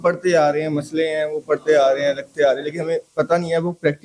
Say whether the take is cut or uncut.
uncut